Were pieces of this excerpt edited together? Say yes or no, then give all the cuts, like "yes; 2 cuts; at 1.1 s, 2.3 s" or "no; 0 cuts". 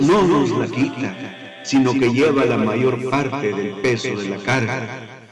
no; 0 cuts